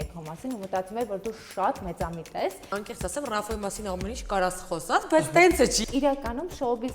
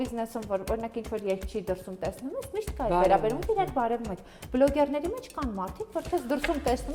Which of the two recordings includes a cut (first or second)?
first